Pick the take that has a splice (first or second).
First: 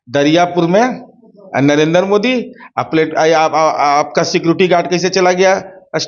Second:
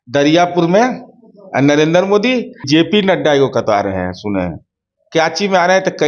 second